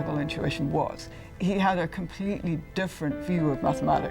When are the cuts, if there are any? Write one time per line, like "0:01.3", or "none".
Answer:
0:00.9